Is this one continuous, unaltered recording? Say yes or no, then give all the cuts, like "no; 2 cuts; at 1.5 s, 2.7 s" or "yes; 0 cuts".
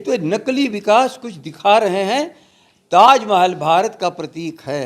yes; 0 cuts